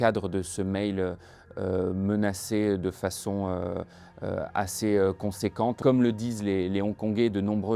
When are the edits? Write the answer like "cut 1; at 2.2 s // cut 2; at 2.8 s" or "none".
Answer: cut 1; at 5.8 s

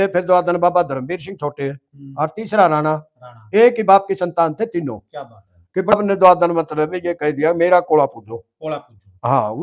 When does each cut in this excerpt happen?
cut 1; at 5.9 s

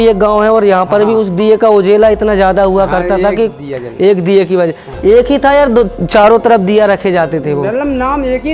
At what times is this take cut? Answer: none

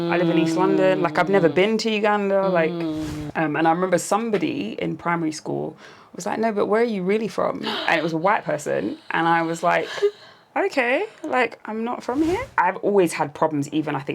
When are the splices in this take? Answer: cut 1; at 3.2 s // cut 2; at 12.5 s

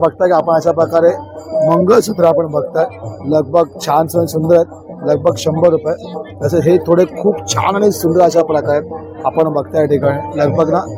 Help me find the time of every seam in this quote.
none

